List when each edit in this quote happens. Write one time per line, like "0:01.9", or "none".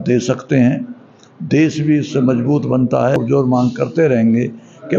0:03.2

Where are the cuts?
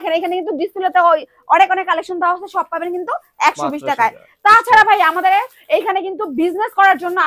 none

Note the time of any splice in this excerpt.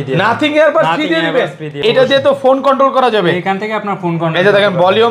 0:01.8

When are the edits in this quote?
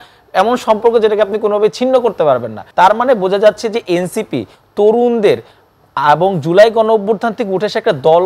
0:02.6

